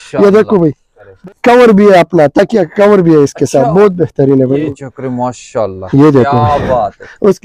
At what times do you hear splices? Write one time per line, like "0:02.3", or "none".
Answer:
0:01.0
0:04.7